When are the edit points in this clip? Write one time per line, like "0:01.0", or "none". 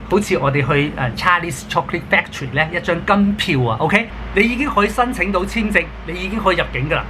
0:04.1